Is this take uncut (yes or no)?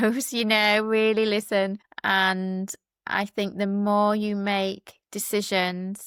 yes